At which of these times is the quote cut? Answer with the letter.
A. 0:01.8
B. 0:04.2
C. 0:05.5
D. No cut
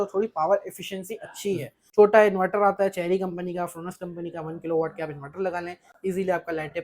A